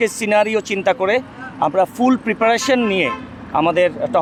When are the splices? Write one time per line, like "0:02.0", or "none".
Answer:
none

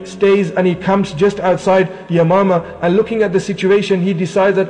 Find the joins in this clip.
none

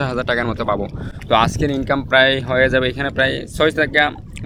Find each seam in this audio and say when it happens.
none

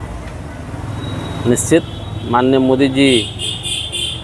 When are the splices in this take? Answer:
none

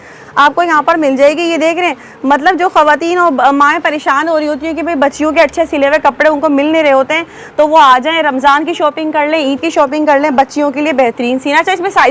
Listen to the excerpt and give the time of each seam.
none

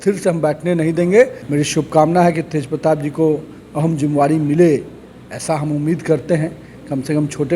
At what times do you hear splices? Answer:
0:01.4

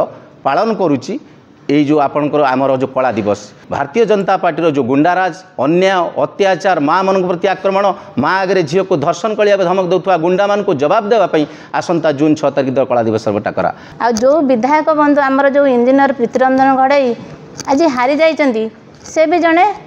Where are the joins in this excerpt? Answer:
0:03.6
0:13.9

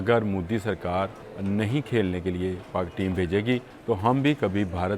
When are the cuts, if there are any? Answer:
0:01.3
0:03.7

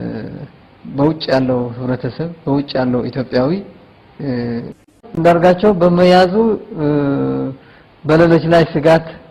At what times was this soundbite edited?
0:04.8

